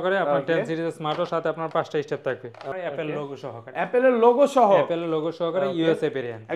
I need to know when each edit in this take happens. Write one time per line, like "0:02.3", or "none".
0:02.7